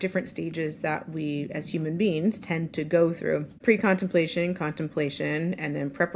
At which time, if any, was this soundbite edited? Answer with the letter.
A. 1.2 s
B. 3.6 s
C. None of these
B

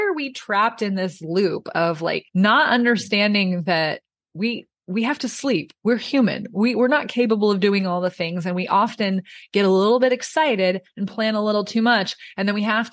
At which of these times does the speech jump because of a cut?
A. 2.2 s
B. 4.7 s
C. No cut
A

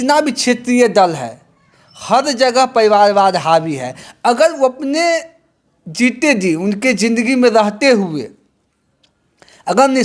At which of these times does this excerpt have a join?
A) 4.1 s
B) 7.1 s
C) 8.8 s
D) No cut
A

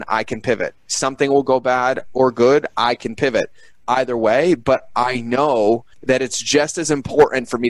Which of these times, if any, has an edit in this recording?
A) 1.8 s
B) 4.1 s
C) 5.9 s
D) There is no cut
C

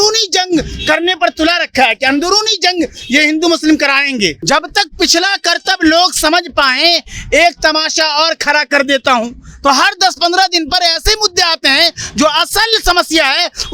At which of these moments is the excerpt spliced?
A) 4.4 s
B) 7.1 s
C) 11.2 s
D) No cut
A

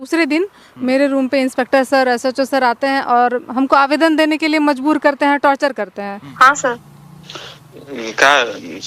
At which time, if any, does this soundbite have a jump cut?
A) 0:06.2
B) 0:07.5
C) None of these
A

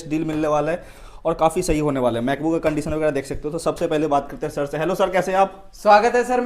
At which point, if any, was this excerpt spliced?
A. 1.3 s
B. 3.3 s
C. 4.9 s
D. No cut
D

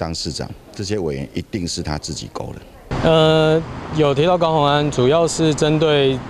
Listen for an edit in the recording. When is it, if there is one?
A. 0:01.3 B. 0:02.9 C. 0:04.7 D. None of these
D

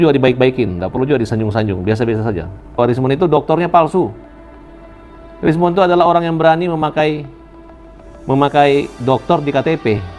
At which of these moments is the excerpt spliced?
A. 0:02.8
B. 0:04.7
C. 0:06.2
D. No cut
A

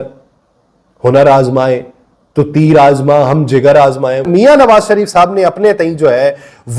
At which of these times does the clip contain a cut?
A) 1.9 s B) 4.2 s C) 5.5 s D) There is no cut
B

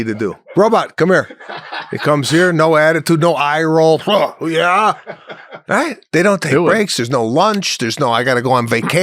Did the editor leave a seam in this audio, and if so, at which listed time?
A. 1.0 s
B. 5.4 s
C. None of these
B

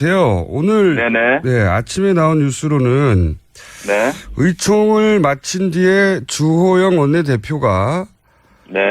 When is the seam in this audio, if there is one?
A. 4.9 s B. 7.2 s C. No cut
B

